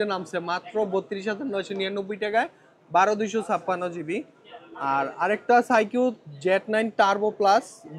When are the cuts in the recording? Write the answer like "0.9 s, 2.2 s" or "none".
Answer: none